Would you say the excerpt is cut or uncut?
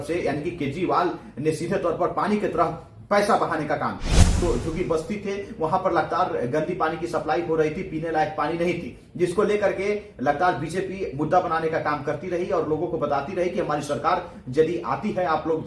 cut